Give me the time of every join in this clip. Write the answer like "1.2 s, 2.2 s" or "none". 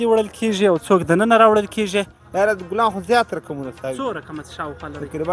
2.2 s